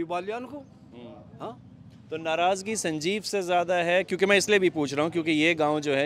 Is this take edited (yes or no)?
no